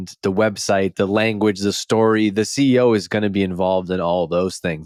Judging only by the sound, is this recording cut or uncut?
uncut